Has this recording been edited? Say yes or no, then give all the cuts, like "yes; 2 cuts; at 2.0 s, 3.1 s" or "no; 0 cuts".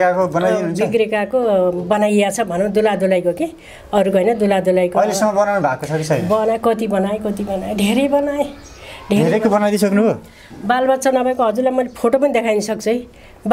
no; 0 cuts